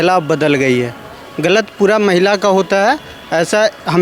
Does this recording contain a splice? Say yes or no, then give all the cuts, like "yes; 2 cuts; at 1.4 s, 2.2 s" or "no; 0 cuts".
no; 0 cuts